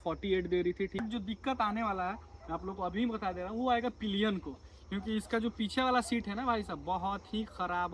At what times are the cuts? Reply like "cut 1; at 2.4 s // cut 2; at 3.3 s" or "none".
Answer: cut 1; at 1.0 s